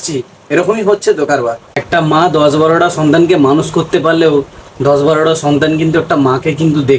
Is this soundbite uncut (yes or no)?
no